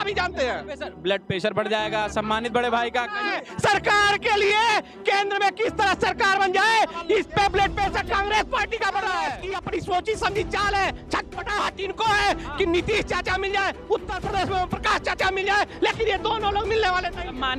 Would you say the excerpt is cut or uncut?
cut